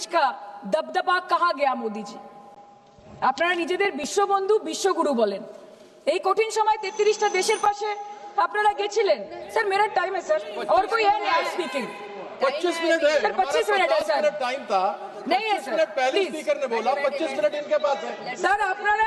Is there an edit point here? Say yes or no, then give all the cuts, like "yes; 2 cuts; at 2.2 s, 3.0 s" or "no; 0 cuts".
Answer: no; 0 cuts